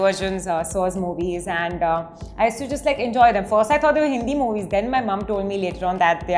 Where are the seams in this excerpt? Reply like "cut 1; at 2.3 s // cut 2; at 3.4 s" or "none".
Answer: none